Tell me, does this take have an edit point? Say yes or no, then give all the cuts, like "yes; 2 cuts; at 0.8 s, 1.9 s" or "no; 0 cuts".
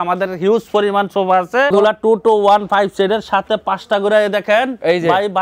yes; 1 cut; at 1.7 s